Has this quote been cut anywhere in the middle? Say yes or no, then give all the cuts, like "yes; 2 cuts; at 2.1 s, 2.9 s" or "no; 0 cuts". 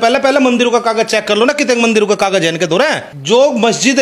yes; 1 cut; at 3.1 s